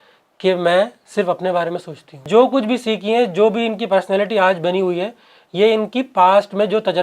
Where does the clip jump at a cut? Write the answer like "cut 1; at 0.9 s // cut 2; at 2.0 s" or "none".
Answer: cut 1; at 2.3 s